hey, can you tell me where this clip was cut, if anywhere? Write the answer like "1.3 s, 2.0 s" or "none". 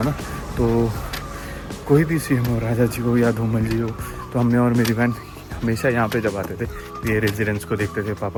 none